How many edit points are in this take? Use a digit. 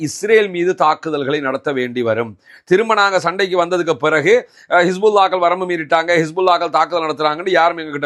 0